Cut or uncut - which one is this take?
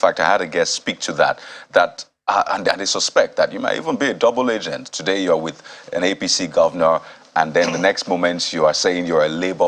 uncut